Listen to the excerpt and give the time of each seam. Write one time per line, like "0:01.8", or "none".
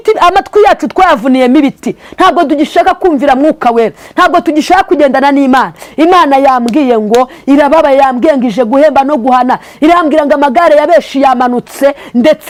none